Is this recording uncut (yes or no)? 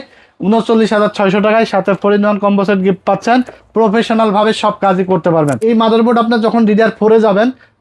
no